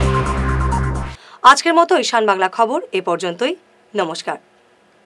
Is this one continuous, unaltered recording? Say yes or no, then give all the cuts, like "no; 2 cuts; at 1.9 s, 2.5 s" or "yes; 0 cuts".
yes; 0 cuts